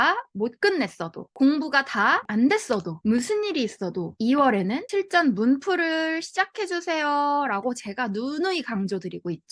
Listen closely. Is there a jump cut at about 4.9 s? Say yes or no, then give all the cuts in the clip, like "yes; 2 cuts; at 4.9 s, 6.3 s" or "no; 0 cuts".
no; 0 cuts